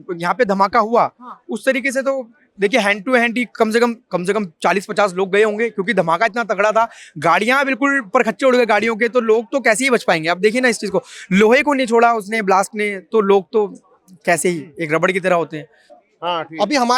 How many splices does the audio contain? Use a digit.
0